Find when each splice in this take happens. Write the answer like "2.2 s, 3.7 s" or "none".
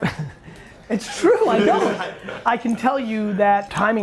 2.0 s